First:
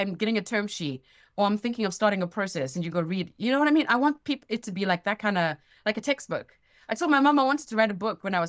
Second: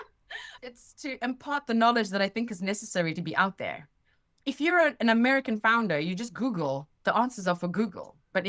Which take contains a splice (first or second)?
second